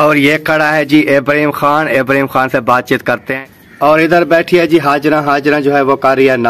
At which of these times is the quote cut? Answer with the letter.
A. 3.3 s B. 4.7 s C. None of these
A